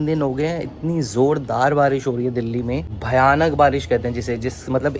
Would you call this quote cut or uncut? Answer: cut